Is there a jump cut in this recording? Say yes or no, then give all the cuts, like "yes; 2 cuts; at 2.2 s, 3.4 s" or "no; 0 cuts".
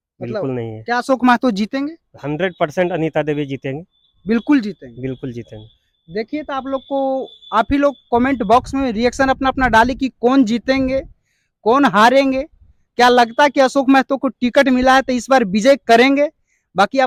no; 0 cuts